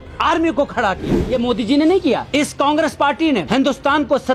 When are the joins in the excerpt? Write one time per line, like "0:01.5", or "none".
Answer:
0:01.1
0:02.2
0:03.4